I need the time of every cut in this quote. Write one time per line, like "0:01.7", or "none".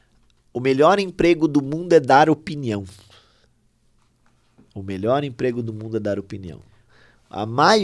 0:04.2